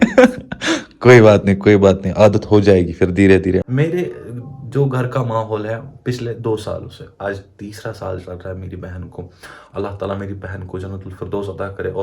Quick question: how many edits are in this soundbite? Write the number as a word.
one